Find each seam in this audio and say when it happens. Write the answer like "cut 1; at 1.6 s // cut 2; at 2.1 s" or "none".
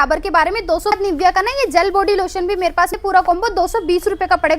cut 1; at 0.9 s // cut 2; at 2.9 s